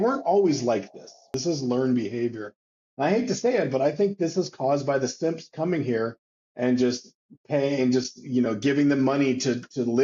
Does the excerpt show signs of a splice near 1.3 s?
yes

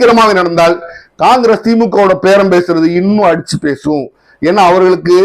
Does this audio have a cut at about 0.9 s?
no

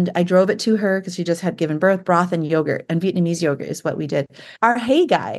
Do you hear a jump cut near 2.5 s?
no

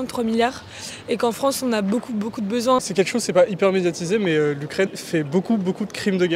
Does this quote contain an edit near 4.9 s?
yes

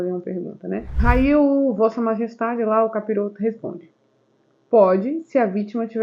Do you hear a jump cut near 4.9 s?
no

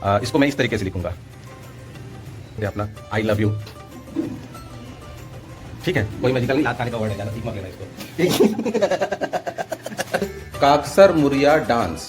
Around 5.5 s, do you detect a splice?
no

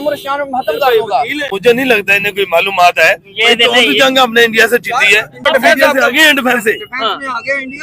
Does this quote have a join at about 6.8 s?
no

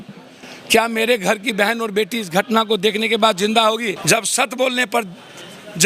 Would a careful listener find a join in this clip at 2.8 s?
no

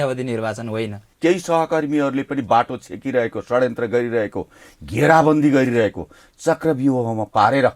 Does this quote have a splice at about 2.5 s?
no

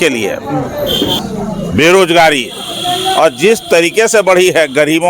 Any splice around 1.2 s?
yes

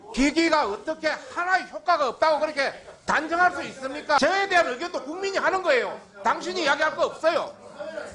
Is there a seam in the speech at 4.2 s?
yes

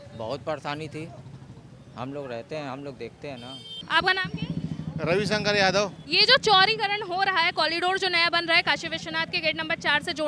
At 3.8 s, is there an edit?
no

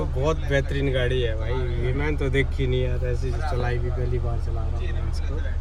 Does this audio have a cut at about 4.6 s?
no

